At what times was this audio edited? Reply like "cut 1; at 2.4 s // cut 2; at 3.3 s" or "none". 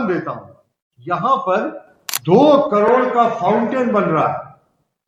none